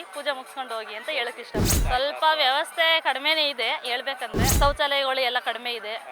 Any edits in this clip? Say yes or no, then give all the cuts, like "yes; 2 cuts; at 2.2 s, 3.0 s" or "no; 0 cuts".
yes; 2 cuts; at 1.7 s, 4.5 s